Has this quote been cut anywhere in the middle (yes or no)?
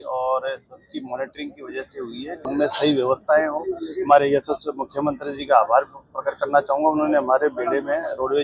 yes